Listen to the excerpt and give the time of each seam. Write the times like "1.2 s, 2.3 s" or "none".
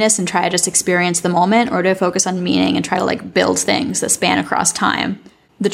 none